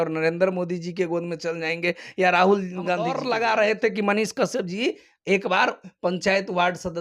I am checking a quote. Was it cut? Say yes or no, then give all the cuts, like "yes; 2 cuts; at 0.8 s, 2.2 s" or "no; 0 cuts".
yes; 1 cut; at 3.2 s